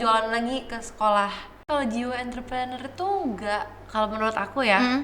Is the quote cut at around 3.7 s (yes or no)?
no